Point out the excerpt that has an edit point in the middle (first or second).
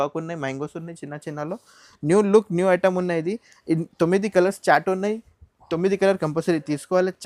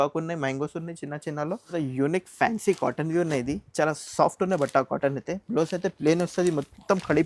second